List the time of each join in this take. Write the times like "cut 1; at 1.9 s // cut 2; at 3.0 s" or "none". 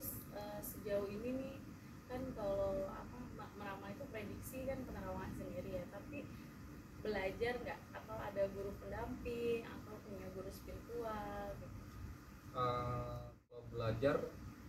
cut 1; at 13.7 s